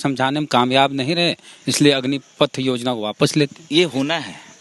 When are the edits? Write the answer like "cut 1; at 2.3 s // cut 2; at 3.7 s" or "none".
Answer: none